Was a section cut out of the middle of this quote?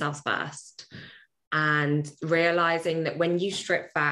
no; 0 cuts

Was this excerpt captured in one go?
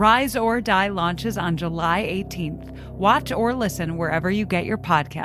yes; 0 cuts

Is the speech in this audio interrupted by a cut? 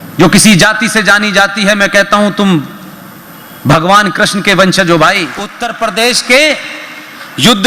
yes; 1 cut; at 5.6 s

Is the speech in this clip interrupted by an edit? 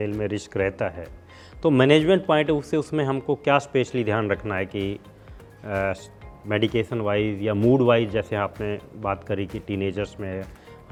no; 0 cuts

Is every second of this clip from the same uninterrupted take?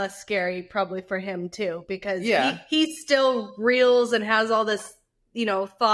yes; 0 cuts

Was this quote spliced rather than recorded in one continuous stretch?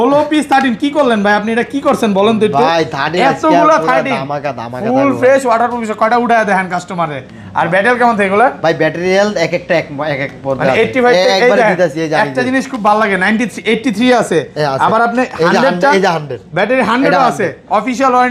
no; 0 cuts

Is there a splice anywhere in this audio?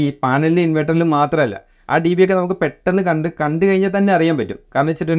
no; 0 cuts

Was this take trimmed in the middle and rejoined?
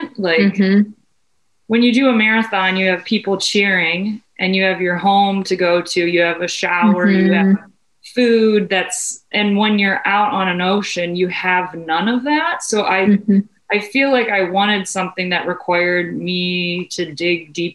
yes; 1 cut; at 9.3 s

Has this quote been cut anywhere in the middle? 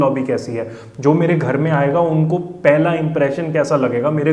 no; 0 cuts

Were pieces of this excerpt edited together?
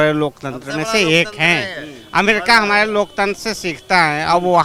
no; 0 cuts

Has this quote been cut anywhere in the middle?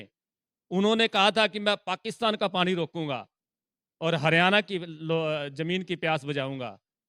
no; 0 cuts

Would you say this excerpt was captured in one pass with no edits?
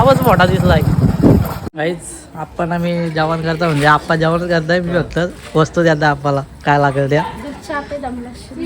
no; 1 cut; at 1.6 s

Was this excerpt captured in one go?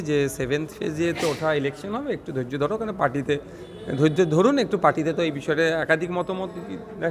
yes; 0 cuts

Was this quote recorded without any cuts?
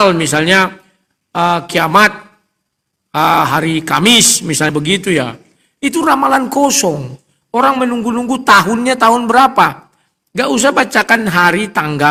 yes; 0 cuts

